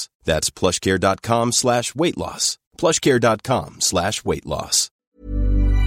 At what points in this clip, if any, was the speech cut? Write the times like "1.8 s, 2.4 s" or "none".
4.9 s